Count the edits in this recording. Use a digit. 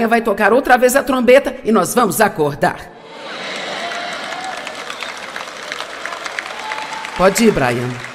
1